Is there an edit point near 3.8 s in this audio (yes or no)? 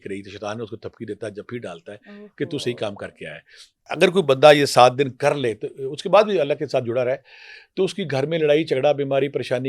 yes